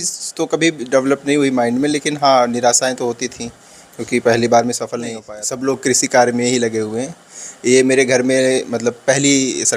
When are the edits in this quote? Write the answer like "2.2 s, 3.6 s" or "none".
5.2 s